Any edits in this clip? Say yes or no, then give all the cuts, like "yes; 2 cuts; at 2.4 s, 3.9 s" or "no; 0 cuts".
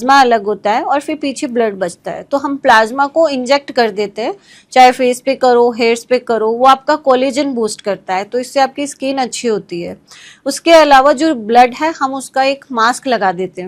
no; 0 cuts